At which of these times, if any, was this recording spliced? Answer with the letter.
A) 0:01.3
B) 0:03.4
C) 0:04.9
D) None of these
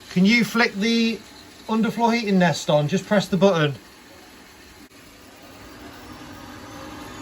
C